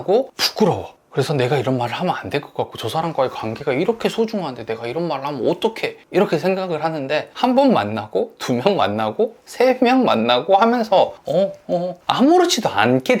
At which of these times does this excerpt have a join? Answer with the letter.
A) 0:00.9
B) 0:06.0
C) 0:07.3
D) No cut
D